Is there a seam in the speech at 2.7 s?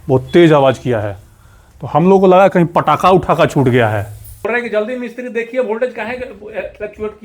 no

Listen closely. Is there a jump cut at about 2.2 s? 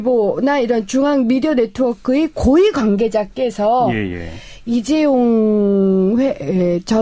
yes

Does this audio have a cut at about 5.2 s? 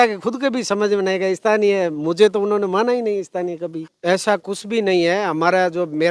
no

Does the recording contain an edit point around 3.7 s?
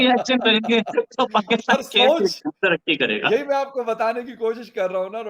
no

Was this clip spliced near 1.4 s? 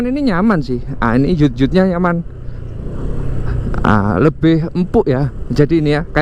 no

